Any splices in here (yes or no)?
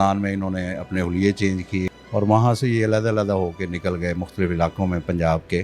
yes